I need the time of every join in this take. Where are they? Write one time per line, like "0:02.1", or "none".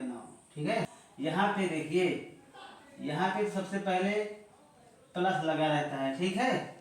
0:01.0

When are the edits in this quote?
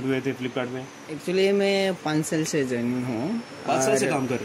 none

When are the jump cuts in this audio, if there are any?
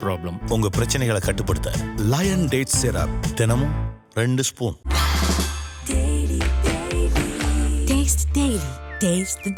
none

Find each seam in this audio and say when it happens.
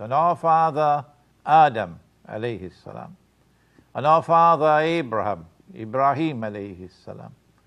0:05.8

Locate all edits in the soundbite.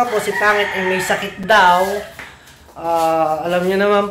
none

